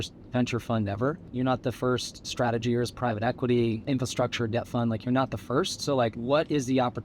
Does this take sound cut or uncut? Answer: cut